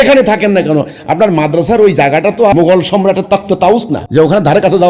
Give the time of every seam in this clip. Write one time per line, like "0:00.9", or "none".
0:02.5
0:04.0